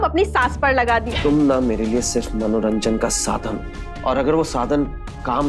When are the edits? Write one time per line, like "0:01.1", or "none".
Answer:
0:01.1